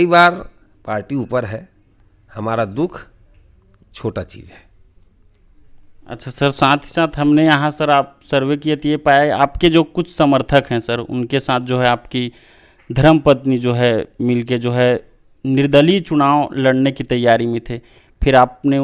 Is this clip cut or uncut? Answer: uncut